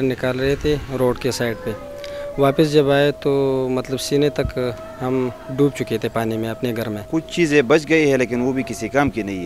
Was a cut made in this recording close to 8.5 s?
no; 1 cut; at 7.0 s

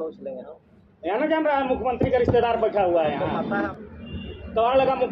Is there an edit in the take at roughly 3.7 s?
yes; 1 cut; at 3.7 s

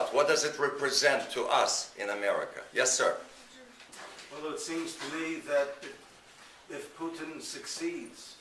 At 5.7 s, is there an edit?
no; 1 cut; at 1.2 s

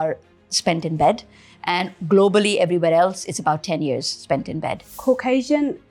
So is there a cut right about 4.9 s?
yes; 1 cut; at 4.9 s

